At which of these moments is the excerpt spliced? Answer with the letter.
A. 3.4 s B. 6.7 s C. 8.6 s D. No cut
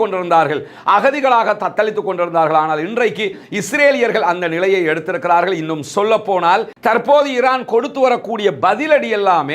B